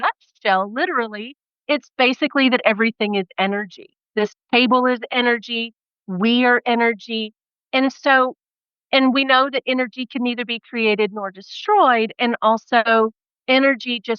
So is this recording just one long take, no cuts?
yes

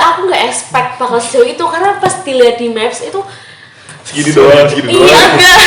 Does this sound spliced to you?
no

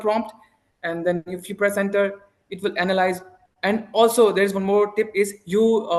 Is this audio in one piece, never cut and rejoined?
yes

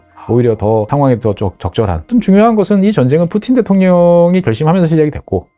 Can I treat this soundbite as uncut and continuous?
no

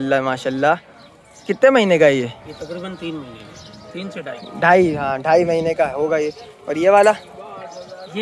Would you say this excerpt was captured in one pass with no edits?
yes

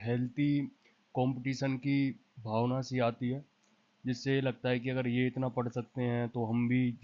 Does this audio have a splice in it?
no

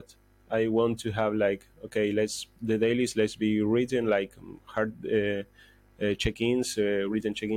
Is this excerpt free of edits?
yes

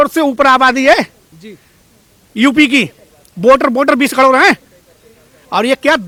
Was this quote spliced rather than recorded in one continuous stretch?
no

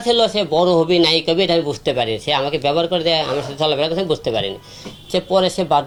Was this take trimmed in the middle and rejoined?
no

